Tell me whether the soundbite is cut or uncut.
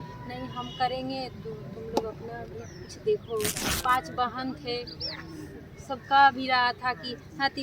cut